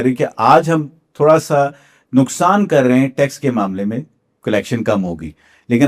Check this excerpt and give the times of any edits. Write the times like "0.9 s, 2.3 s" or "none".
none